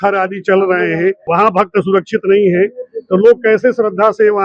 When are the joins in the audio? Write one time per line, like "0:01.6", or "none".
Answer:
0:01.2